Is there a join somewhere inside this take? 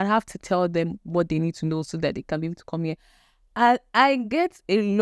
no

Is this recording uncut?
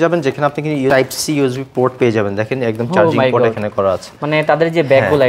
no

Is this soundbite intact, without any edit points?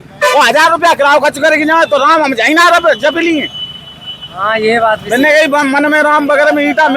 yes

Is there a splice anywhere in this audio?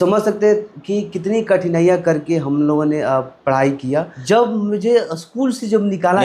yes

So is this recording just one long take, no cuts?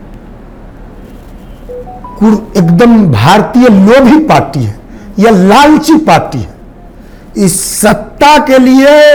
yes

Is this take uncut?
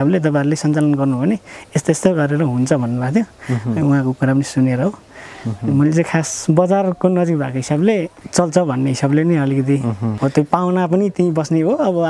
no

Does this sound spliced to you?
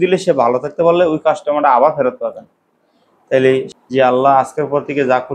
yes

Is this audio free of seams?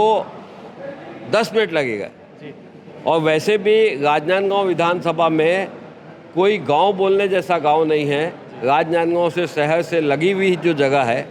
yes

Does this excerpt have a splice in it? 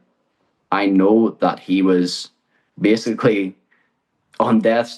no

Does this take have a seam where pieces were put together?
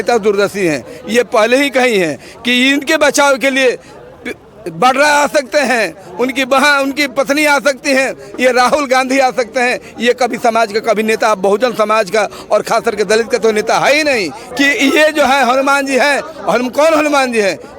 yes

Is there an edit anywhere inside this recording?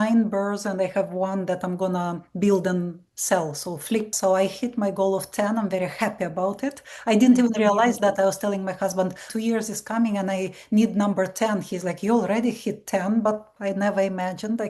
yes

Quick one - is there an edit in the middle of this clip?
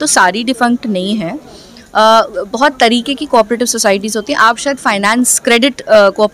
no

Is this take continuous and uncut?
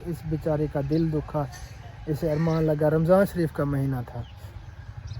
yes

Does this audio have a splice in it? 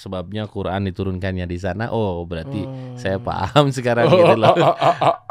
no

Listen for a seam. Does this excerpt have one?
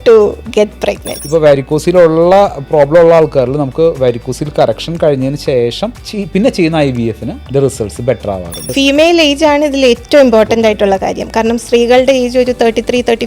yes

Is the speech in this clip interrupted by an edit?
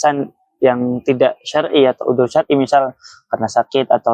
no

